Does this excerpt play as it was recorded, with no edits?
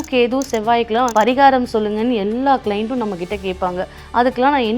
no; 1 cut; at 1.1 s

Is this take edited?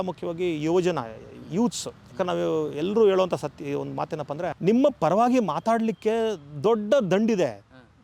yes; 1 cut; at 4.6 s

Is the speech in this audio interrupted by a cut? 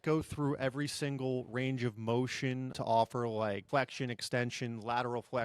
yes; 2 cuts; at 2.7 s, 3.6 s

